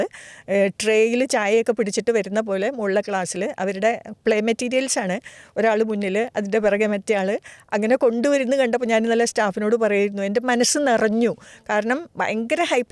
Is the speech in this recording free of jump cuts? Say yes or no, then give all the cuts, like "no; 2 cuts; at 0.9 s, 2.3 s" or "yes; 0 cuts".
yes; 0 cuts